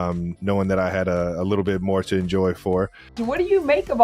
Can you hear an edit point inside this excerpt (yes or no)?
yes